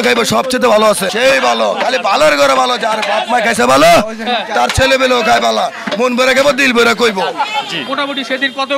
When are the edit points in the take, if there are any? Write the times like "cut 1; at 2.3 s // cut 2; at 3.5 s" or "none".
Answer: cut 1; at 1.1 s // cut 2; at 7.7 s